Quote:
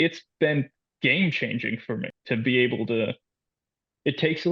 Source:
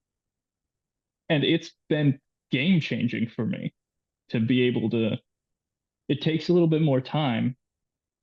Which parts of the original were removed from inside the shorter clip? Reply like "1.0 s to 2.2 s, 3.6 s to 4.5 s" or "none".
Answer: 3.6 s to 4.2 s